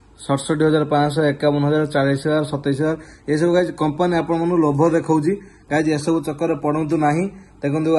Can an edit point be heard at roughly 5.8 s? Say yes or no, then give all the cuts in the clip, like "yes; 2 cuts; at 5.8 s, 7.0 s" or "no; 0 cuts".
no; 0 cuts